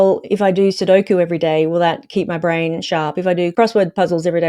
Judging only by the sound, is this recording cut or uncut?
cut